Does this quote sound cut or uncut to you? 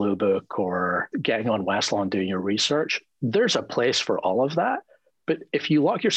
cut